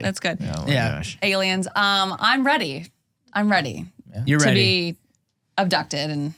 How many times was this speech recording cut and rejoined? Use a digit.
0